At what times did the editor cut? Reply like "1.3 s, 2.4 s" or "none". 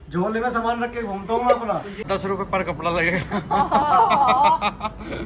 2.0 s